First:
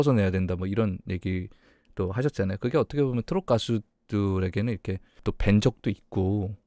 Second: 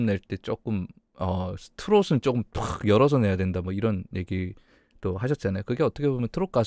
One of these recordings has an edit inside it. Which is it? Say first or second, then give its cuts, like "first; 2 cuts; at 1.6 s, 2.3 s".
first; 1 cut; at 5.2 s